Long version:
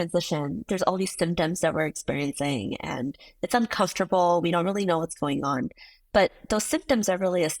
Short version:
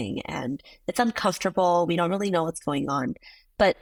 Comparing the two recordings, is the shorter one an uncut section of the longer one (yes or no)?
yes